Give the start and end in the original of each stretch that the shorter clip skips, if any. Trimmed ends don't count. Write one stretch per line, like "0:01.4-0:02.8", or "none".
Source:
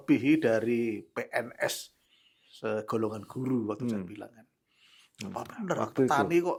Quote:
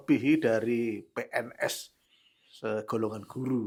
none